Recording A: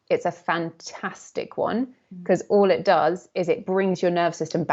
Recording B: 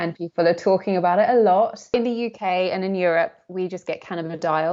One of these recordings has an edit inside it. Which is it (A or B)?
B